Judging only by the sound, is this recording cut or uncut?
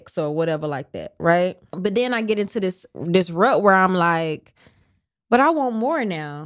cut